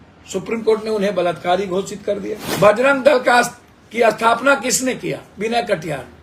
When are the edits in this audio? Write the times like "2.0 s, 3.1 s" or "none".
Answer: 2.5 s